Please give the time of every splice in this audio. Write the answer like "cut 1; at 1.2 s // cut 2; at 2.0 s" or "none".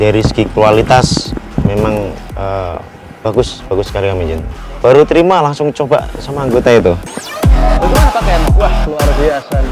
cut 1; at 4.5 s